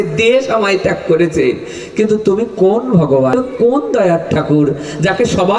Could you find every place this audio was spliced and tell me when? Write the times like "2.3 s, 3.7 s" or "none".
3.3 s